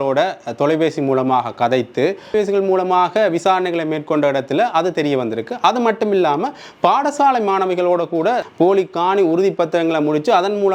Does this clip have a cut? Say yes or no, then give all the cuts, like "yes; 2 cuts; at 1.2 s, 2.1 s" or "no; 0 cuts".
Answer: yes; 2 cuts; at 2.3 s, 8.5 s